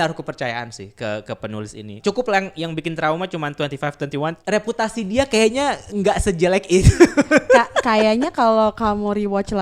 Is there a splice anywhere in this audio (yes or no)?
yes